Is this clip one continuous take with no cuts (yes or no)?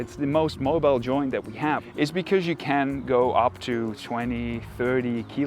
no